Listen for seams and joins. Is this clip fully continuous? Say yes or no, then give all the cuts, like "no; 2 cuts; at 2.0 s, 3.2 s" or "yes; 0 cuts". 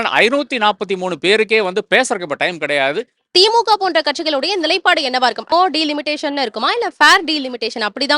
no; 2 cuts; at 3.1 s, 5.5 s